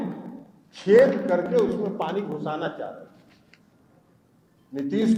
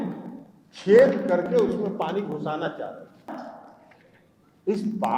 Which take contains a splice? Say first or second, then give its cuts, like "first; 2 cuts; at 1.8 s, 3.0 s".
second; 1 cut; at 3.3 s